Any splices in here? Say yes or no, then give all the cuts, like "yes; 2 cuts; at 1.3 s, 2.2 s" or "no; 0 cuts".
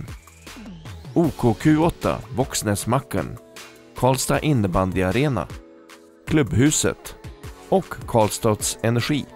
no; 0 cuts